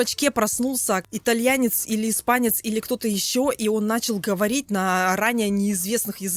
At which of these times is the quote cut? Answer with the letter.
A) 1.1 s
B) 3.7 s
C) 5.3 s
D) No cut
A